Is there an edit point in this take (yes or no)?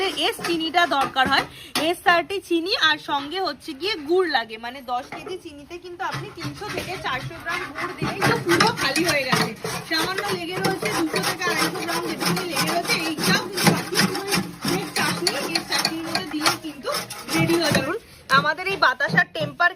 yes